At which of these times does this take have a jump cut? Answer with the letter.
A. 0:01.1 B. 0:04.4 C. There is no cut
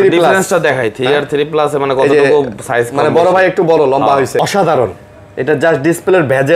B